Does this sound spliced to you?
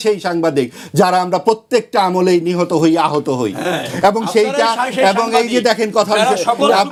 no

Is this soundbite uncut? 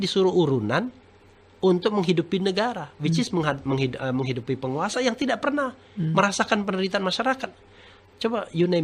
yes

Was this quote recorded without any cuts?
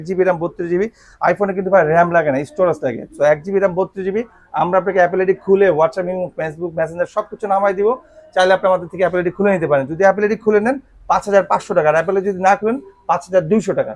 yes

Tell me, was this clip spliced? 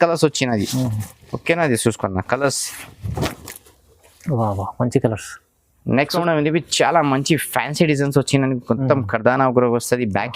yes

